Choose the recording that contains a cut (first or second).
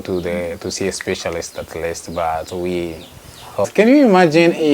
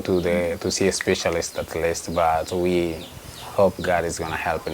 first